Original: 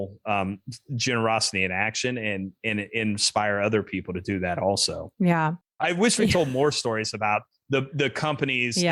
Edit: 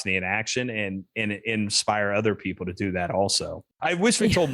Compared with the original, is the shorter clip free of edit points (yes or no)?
no